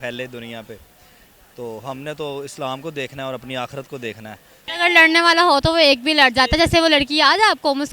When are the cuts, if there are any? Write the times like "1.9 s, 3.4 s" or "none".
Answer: 4.6 s